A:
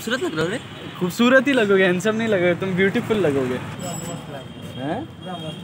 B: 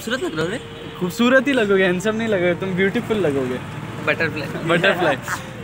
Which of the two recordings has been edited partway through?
A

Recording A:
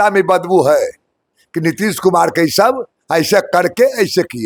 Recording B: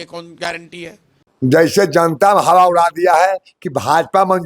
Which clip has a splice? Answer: B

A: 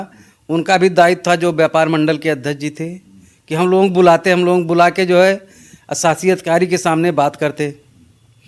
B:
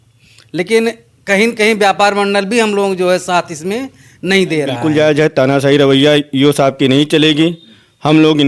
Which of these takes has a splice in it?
B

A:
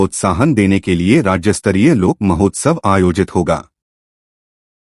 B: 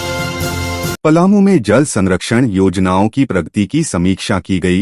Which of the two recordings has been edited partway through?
B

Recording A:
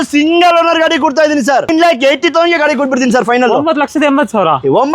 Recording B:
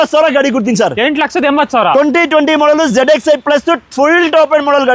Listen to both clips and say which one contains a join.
A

